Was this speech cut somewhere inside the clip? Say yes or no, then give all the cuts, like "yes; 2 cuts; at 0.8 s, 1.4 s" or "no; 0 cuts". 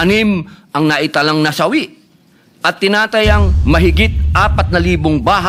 no; 0 cuts